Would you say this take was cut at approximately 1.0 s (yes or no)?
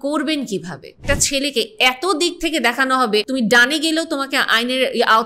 yes